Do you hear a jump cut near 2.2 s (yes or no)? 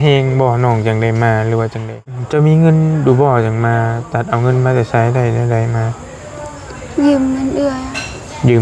yes